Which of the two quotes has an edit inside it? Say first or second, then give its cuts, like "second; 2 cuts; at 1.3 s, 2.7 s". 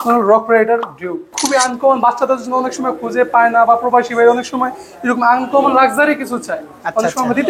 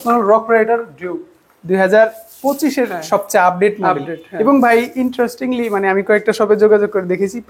first; 1 cut; at 1.3 s